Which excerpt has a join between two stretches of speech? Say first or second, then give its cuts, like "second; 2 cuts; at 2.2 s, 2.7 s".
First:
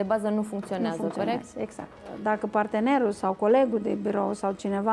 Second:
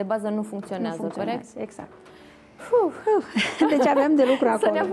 first; 1 cut; at 2.2 s